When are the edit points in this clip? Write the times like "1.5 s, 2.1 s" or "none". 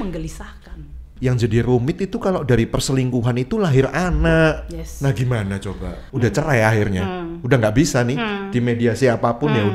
1.1 s, 6.0 s